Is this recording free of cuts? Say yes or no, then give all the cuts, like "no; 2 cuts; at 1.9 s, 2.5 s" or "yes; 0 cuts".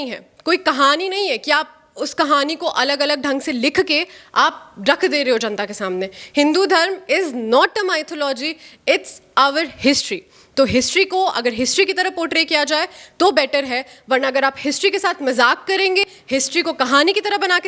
no; 1 cut; at 16.2 s